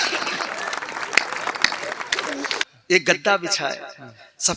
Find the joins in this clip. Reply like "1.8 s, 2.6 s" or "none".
2.5 s